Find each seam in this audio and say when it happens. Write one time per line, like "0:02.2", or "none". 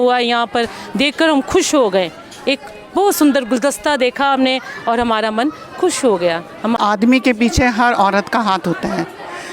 0:06.8